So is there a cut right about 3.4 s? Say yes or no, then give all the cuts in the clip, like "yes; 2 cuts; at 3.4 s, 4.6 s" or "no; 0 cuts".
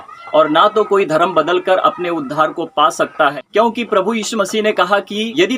yes; 1 cut; at 3.4 s